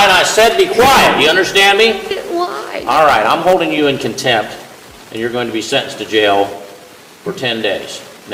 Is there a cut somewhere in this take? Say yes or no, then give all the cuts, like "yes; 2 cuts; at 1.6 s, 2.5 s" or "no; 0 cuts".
no; 0 cuts